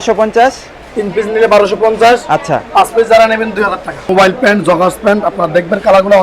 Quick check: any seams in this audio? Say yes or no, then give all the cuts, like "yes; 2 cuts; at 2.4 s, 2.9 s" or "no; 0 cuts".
yes; 1 cut; at 3.9 s